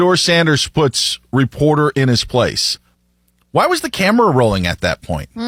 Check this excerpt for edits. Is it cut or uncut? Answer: uncut